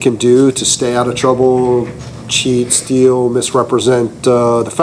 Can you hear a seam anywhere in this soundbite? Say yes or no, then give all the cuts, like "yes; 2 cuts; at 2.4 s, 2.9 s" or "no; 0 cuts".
no; 0 cuts